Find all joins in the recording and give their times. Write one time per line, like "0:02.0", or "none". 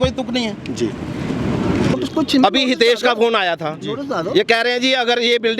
0:01.9